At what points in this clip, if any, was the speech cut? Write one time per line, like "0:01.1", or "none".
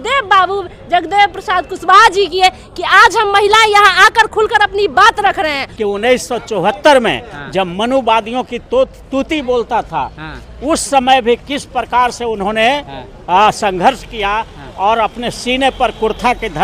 0:05.6